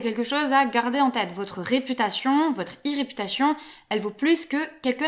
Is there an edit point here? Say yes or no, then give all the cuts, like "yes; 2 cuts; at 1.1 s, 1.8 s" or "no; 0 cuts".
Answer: no; 0 cuts